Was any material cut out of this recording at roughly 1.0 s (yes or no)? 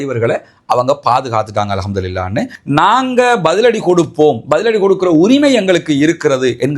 no